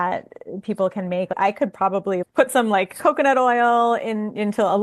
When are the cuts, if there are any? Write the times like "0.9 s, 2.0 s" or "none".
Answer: 1.3 s